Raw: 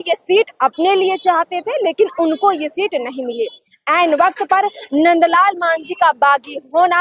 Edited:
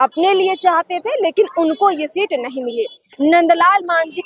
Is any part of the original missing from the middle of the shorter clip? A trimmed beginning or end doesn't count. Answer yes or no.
yes